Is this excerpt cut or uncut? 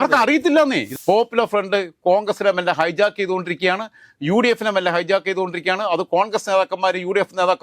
cut